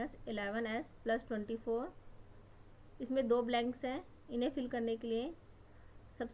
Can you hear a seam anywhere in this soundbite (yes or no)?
no